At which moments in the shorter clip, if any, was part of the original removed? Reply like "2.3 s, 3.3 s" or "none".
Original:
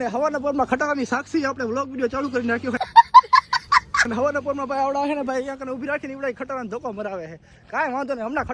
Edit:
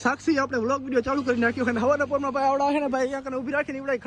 1.7 s